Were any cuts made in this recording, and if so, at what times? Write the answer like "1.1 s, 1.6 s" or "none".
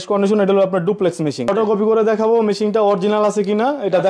1.5 s